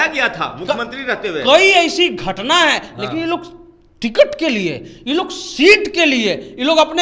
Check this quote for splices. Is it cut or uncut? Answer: uncut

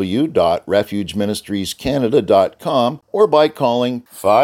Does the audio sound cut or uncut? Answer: cut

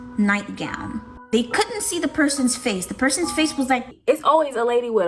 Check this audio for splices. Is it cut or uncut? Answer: cut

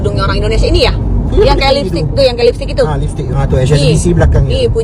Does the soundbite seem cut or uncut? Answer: cut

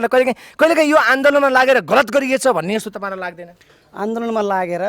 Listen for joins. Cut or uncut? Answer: uncut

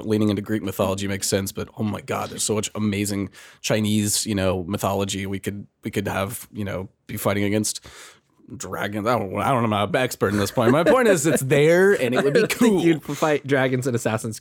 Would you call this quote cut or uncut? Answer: uncut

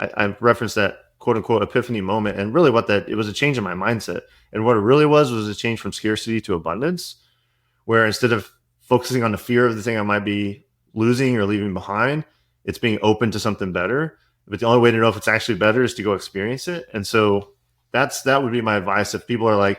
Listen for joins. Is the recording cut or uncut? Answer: uncut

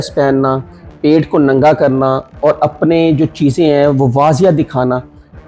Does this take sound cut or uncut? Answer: uncut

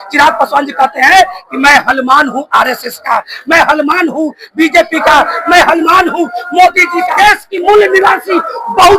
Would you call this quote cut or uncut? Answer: cut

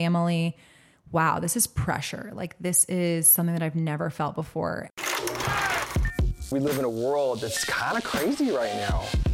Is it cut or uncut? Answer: cut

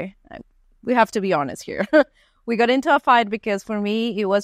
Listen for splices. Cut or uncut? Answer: uncut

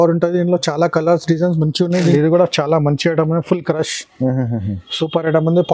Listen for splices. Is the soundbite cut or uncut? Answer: cut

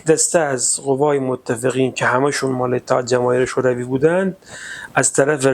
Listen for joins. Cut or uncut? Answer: uncut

